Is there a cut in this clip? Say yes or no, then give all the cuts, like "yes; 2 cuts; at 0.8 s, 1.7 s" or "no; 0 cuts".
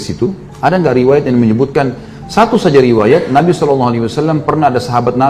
no; 0 cuts